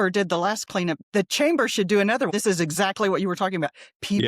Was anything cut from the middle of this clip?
yes; 2 cuts; at 1.0 s, 2.3 s

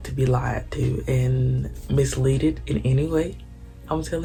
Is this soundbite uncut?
yes; 0 cuts

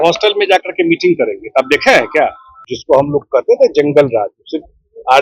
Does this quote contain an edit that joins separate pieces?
yes; 1 cut; at 2.7 s

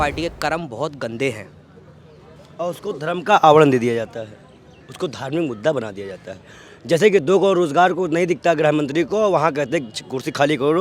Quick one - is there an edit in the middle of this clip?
no; 0 cuts

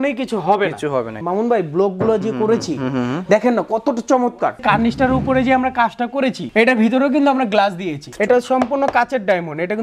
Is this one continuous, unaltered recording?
no; 4 cuts; at 1.2 s, 4.6 s, 6.4 s, 8.1 s

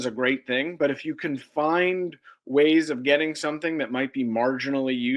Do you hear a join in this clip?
no; 0 cuts

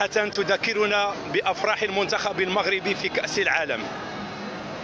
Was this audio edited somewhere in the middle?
no; 0 cuts

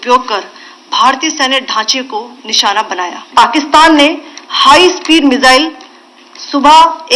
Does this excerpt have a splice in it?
yes; 1 cut; at 3.2 s

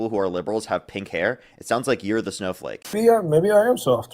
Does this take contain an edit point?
yes; 1 cut; at 2.9 s

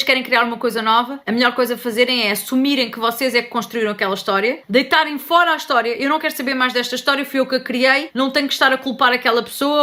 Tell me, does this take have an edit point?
no; 0 cuts

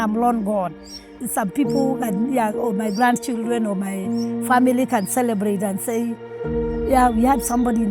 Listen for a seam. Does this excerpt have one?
yes; 1 cut; at 1.2 s

